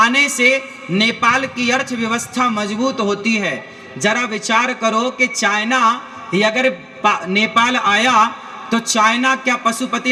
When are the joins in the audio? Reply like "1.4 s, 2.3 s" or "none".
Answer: none